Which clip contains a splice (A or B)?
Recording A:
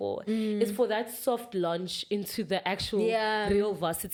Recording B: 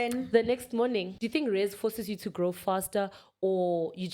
B